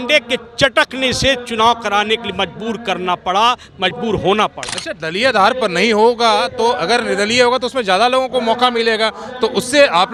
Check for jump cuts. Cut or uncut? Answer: uncut